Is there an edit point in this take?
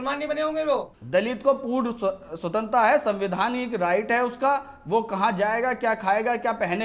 yes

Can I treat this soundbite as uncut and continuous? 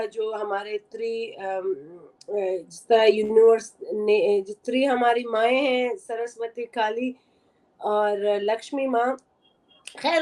yes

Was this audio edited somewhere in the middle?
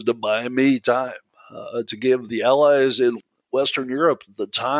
yes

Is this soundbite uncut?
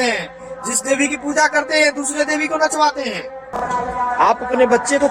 no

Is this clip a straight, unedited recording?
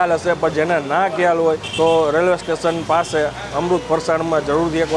yes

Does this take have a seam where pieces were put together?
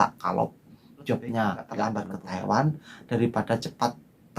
yes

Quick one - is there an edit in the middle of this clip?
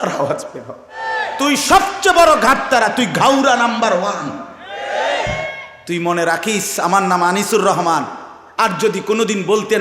yes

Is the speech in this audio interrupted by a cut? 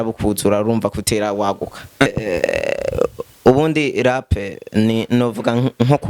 yes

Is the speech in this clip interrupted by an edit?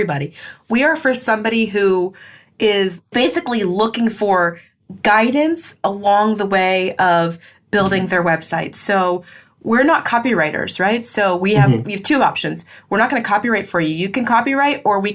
no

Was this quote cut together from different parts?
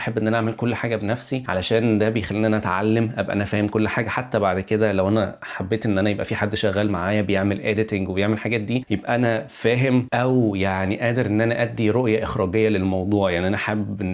no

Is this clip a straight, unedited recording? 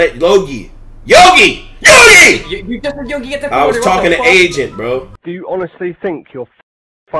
yes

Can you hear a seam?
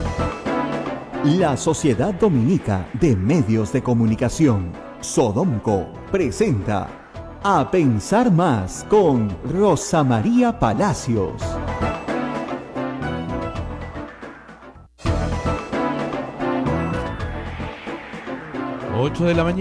yes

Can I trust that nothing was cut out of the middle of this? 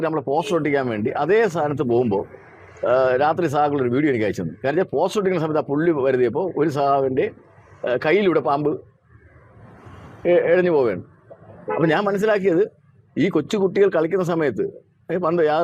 yes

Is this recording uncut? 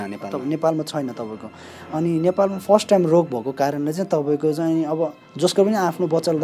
yes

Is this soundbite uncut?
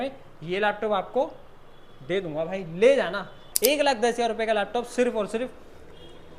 no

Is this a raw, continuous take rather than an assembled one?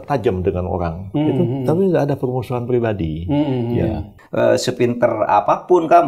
no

